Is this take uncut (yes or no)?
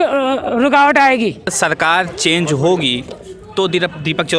no